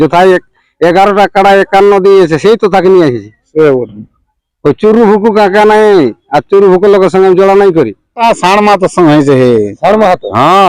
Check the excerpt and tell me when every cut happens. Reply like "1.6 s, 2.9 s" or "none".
8.1 s